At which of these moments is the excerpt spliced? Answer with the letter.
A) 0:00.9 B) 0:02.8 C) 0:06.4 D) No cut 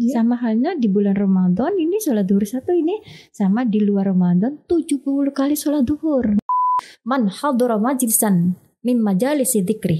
C